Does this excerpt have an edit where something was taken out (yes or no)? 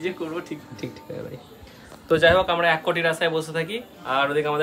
no